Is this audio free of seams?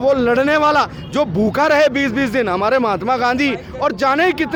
yes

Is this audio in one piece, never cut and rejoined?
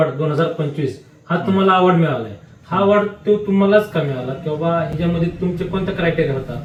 yes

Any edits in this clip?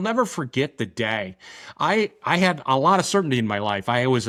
no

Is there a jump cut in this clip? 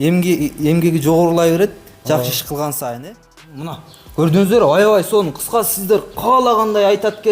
yes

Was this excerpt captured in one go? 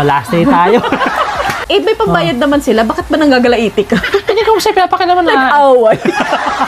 no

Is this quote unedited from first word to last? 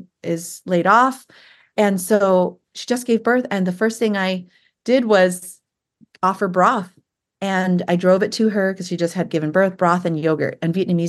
yes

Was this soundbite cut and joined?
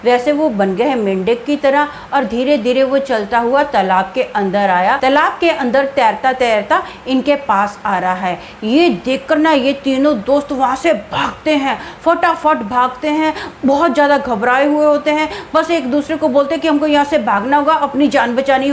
no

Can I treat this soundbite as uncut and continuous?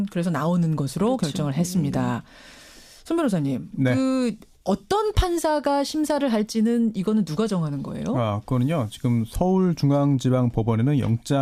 yes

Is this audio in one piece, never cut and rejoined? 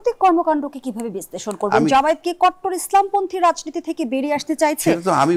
yes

